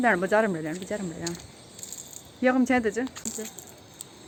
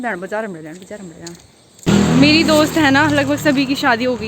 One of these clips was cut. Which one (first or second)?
second